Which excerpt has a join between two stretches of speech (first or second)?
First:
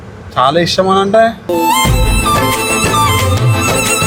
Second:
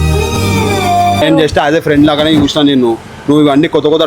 second